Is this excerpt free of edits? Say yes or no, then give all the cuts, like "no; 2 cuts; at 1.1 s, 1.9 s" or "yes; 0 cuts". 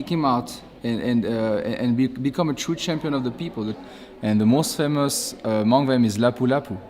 no; 1 cut; at 3.8 s